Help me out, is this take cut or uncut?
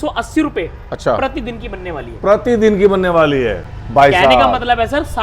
uncut